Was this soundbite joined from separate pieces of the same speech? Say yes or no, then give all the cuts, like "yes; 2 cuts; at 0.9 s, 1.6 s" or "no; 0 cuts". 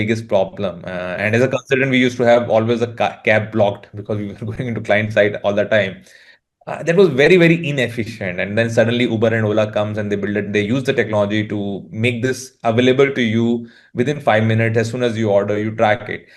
no; 0 cuts